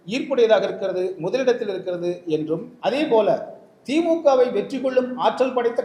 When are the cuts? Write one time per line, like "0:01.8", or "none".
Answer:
0:02.7